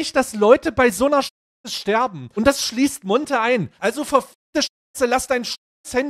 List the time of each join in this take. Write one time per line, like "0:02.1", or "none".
0:02.2
0:03.7